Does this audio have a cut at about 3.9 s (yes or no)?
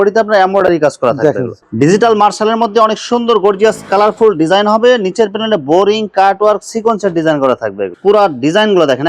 no